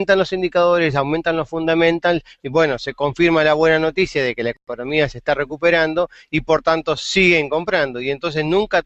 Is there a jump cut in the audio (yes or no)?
yes